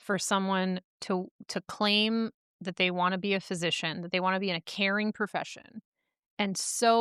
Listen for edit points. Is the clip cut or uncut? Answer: uncut